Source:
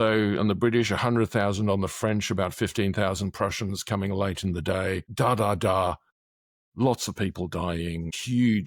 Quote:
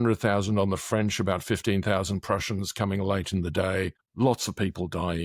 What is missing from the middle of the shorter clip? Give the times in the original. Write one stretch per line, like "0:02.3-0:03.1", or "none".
0:05.1-0:06.6